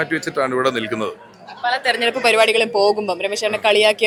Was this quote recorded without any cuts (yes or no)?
yes